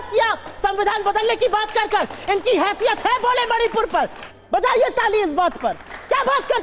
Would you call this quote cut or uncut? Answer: cut